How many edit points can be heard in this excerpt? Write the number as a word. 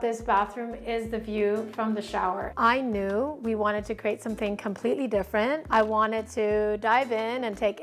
two